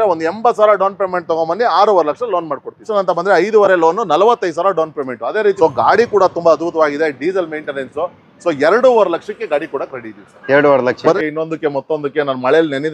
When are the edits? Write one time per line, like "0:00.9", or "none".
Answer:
0:02.9
0:05.6
0:11.2